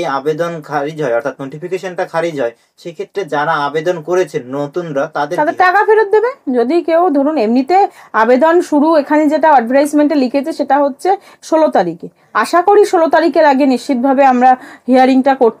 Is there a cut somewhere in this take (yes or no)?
no